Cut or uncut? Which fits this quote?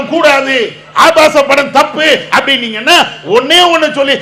uncut